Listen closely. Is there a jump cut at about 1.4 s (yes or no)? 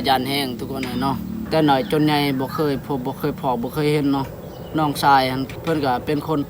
yes